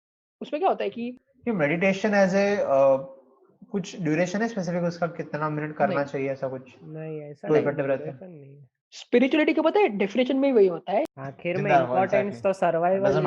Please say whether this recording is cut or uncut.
cut